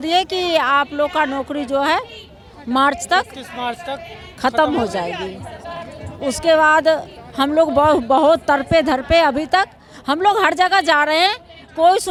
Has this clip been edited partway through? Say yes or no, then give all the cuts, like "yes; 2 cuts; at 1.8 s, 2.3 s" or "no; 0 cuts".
no; 0 cuts